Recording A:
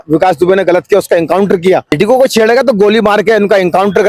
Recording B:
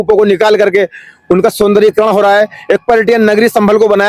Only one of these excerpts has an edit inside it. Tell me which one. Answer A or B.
A